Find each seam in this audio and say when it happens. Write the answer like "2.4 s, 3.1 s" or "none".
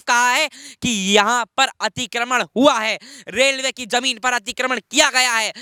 none